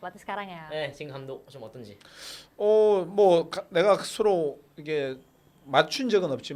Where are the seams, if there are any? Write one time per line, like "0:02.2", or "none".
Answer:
none